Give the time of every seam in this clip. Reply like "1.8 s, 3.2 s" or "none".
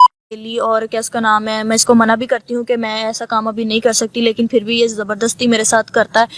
none